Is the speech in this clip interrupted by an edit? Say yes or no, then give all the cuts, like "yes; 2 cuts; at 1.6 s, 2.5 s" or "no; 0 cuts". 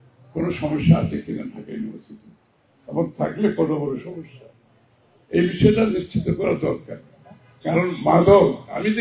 no; 0 cuts